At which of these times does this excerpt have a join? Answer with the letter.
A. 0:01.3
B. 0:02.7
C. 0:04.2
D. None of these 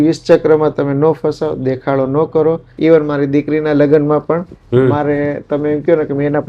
B